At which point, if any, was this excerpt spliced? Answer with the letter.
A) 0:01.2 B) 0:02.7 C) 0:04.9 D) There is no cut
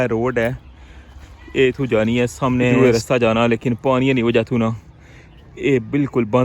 B